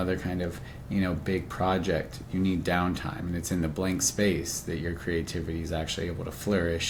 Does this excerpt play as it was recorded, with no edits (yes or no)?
yes